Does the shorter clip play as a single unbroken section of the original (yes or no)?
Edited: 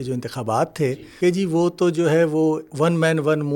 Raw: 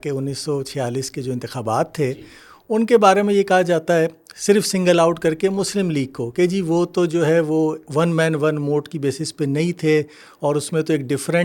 no